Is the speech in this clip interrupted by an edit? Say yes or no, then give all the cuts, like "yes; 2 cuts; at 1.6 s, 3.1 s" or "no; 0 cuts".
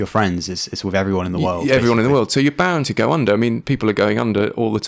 no; 0 cuts